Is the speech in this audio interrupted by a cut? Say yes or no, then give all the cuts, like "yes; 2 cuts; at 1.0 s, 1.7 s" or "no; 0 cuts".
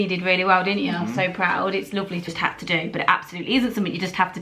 yes; 1 cut; at 2.3 s